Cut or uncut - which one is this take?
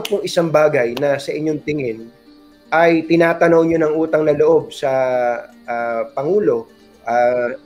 uncut